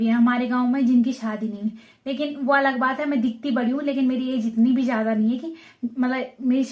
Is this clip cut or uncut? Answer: uncut